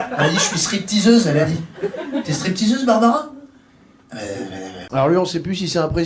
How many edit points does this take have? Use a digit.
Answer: 1